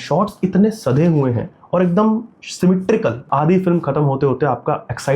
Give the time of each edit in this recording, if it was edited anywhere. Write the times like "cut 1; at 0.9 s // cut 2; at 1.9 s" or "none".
cut 1; at 3.2 s

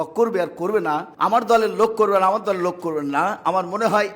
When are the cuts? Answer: cut 1; at 1.1 s

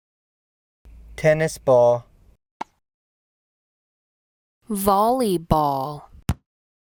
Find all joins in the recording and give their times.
none

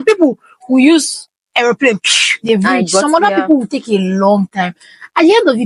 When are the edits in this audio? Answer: none

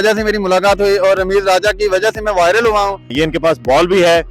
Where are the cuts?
cut 1; at 3.1 s

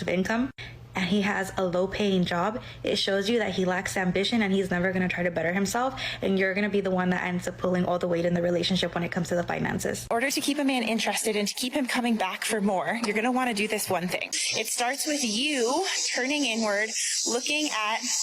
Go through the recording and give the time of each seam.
cut 1; at 10.1 s // cut 2; at 14.4 s

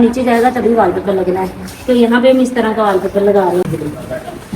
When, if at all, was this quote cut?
cut 1; at 3.7 s

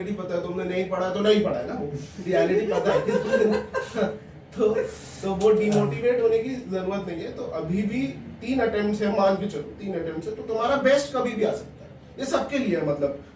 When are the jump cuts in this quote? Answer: none

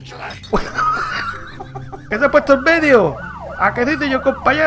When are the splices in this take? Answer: cut 1; at 2.0 s

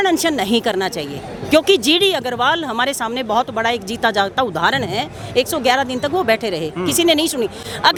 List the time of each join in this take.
none

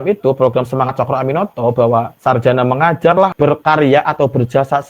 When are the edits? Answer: cut 1; at 2.1 s // cut 2; at 3.3 s

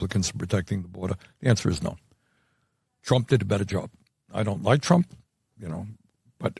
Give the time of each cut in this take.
none

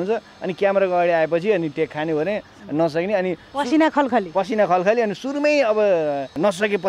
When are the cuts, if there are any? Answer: none

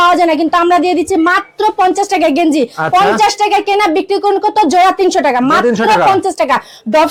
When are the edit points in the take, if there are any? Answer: none

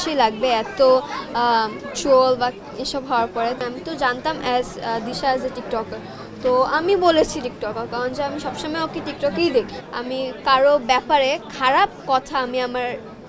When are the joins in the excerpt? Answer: cut 1; at 3.6 s // cut 2; at 9.8 s

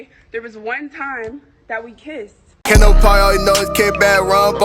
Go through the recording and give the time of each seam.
cut 1; at 2.7 s

